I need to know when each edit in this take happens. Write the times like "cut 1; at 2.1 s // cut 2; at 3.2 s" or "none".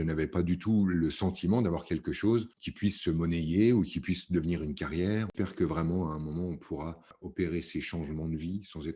cut 1; at 2.6 s // cut 2; at 5.3 s // cut 3; at 7.1 s